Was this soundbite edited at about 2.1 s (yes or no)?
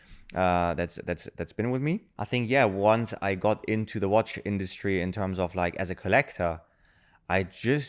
yes